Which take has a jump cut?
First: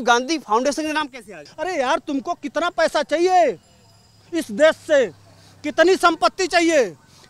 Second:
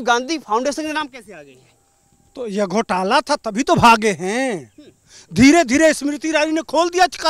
first; 1 cut; at 1.4 s

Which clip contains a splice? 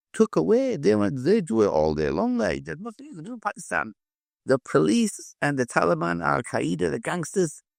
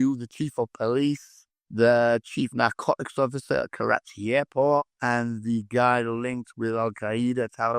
second; 1 cut; at 4.9 s

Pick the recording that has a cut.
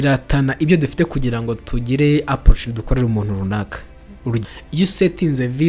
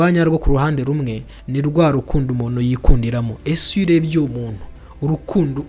first; 1 cut; at 4.4 s

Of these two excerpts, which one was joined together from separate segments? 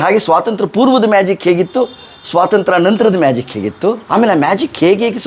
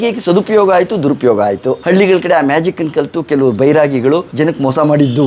first; 1 cut; at 4.0 s

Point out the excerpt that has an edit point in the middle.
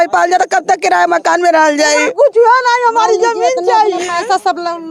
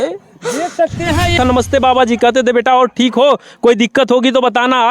second; 1 cut; at 1.3 s

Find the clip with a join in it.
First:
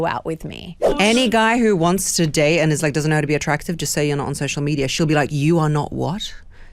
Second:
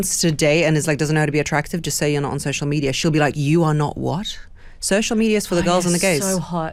first; 1 cut; at 1.0 s

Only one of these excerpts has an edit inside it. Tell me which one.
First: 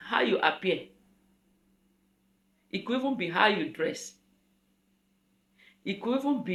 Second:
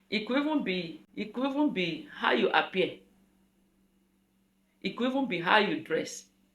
second; 1 cut; at 1.0 s

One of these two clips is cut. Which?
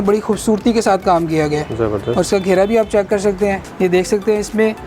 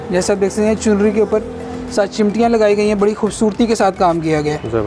first; 1 cut; at 3.7 s

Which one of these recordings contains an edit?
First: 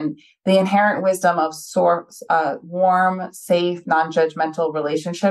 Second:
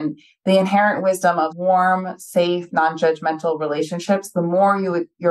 second; 1 cut; at 1.5 s

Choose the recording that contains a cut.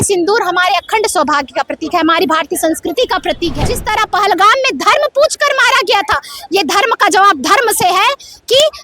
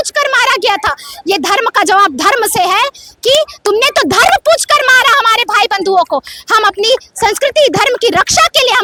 first; 1 cut; at 3.7 s

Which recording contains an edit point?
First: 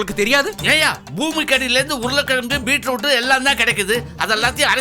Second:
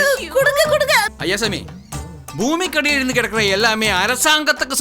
second; 1 cut; at 1.1 s

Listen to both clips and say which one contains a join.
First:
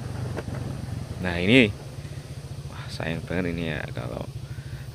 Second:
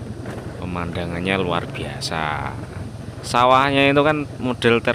first; 1 cut; at 1.2 s

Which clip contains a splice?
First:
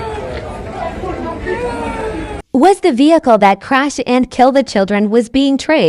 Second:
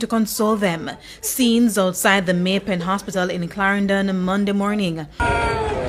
first; 1 cut; at 2.4 s

